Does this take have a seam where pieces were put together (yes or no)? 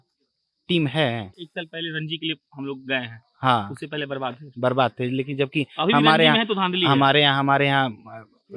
no